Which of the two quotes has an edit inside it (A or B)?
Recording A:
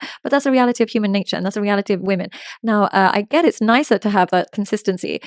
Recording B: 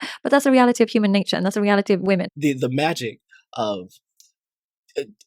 B